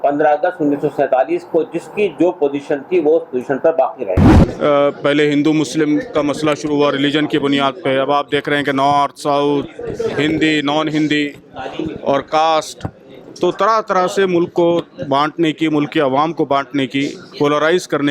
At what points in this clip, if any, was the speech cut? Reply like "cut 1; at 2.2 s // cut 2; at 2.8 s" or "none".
cut 1; at 4.3 s